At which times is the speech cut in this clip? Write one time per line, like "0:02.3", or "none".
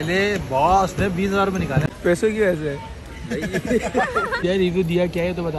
0:01.9
0:04.3